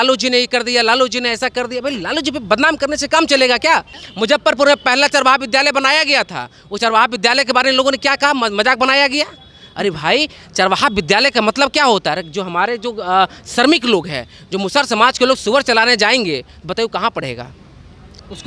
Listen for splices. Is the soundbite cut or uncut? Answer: cut